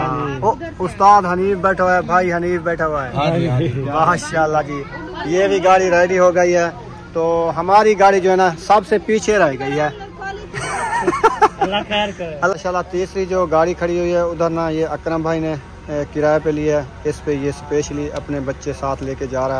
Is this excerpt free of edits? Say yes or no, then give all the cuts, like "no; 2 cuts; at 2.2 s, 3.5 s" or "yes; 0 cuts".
no; 1 cut; at 12.5 s